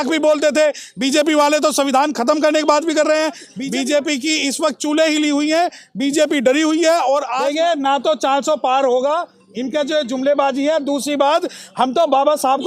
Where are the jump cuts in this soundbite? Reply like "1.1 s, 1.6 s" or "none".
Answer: 3.6 s, 7.3 s